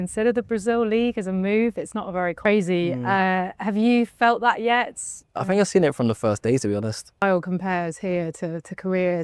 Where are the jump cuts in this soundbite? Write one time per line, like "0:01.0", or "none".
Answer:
0:02.4
0:07.2